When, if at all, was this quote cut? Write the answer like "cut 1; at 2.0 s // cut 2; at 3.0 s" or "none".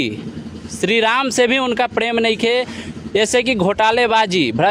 none